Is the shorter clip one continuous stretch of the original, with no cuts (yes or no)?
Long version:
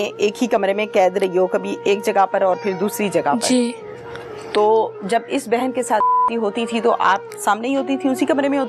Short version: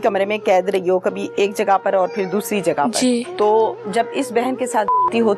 no